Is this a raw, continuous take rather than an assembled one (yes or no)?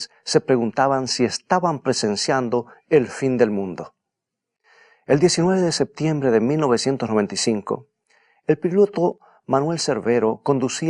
no